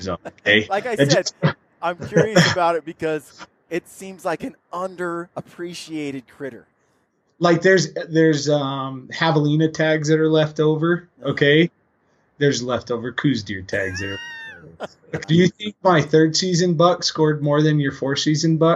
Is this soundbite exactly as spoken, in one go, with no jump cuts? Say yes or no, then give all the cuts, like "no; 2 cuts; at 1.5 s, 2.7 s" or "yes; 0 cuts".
no; 1 cut; at 15.2 s